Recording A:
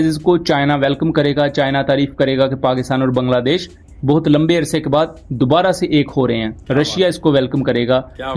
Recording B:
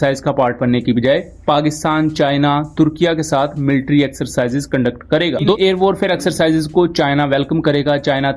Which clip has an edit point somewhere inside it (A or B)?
B